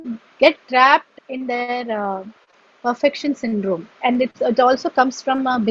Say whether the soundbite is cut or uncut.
cut